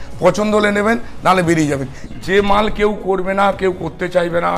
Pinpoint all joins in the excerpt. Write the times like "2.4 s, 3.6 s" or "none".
2.0 s